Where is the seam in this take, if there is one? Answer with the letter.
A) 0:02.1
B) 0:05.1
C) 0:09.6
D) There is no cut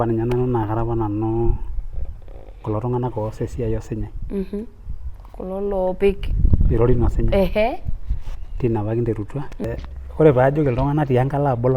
C